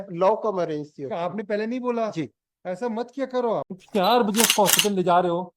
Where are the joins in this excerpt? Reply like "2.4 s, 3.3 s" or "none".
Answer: 3.8 s